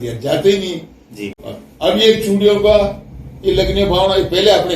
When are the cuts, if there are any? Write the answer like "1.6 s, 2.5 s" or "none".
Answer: 1.2 s